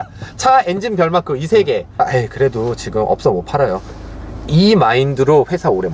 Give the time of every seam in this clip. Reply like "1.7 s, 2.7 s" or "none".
2.0 s